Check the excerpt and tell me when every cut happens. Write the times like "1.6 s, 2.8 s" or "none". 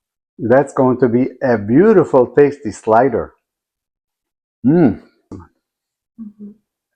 5.2 s